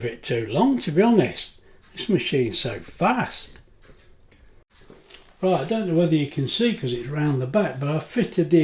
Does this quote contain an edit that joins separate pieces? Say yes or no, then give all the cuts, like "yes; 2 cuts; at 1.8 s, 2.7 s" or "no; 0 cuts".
no; 0 cuts